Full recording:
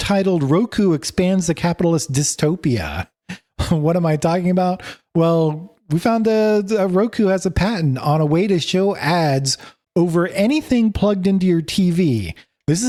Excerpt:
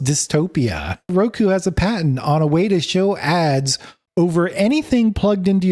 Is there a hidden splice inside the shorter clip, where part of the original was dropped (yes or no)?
yes